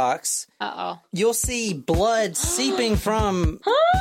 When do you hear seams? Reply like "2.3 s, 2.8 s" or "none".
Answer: 1.0 s